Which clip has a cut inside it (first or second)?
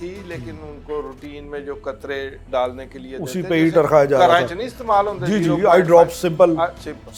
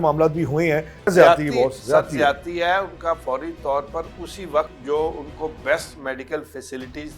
second